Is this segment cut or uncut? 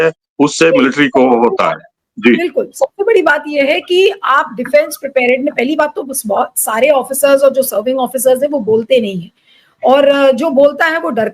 uncut